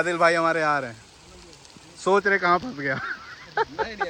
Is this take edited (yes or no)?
no